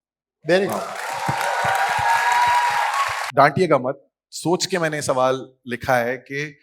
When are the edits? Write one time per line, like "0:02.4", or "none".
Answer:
0:03.2